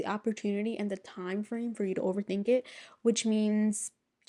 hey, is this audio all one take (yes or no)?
yes